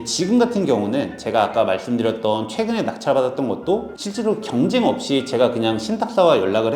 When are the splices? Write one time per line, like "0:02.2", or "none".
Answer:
0:04.0